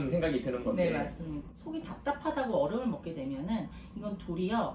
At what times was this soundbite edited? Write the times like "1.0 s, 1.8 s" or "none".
1.4 s